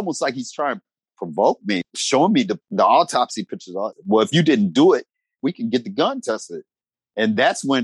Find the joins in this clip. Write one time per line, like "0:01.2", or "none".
0:01.0
0:01.8
0:02.6
0:03.9
0:05.4